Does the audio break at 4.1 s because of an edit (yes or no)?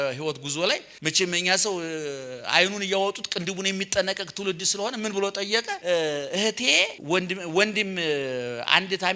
no